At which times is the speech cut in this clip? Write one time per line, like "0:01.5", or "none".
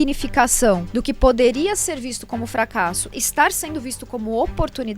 0:00.9
0:03.1